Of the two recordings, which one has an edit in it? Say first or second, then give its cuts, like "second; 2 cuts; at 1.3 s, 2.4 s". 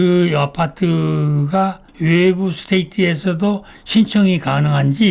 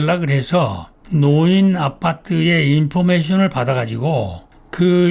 first; 1 cut; at 1.8 s